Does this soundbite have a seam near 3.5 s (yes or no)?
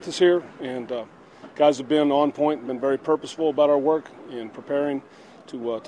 yes